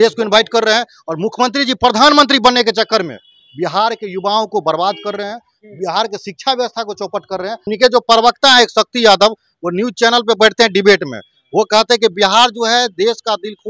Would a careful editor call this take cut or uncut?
cut